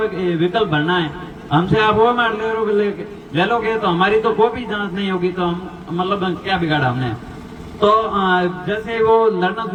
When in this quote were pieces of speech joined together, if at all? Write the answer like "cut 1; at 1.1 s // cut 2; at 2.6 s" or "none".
none